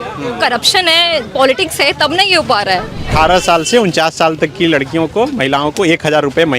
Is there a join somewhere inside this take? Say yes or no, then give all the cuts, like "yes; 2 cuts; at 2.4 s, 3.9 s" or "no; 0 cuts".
yes; 1 cut; at 3.1 s